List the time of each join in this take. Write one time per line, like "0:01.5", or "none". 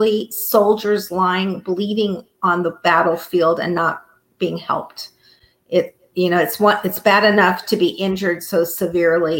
none